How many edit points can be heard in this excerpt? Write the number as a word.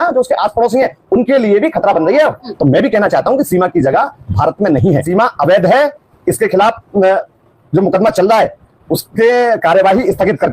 two